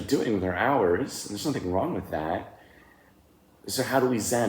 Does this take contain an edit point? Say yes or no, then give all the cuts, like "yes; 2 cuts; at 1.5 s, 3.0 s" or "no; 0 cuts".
no; 0 cuts